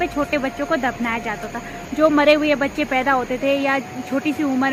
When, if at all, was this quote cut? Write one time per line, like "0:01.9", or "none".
none